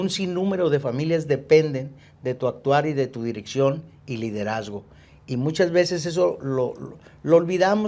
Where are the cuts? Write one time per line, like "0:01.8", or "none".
none